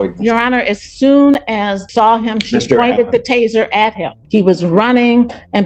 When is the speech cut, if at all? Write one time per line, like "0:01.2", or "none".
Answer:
0:01.8
0:04.2